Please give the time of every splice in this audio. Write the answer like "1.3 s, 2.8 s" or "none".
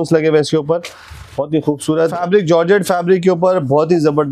2.2 s